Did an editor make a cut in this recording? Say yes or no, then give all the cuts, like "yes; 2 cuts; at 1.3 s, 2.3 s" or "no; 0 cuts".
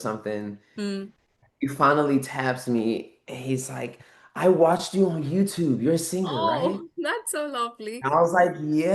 no; 0 cuts